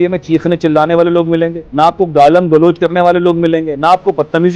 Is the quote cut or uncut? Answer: uncut